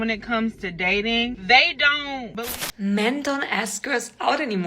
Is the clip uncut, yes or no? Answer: no